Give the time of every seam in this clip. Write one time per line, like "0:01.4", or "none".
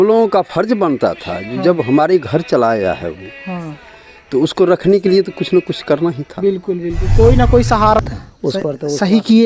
0:08.0